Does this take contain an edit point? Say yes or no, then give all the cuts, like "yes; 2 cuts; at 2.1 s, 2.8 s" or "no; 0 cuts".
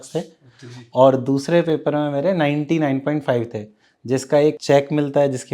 yes; 1 cut; at 4.6 s